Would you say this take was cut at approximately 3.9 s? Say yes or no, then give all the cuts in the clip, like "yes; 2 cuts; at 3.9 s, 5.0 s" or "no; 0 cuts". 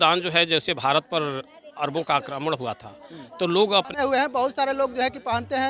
yes; 1 cut; at 3.9 s